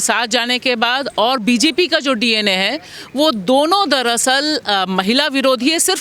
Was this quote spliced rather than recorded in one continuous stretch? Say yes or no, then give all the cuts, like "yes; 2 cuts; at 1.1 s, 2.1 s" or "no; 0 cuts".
no; 0 cuts